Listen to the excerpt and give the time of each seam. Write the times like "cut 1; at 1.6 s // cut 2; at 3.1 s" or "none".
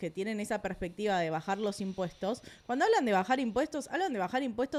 none